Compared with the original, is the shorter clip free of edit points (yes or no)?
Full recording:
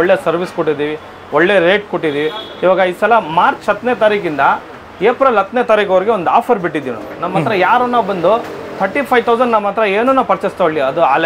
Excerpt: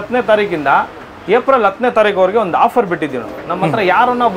yes